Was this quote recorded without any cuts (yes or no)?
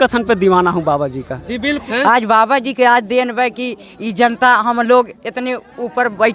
no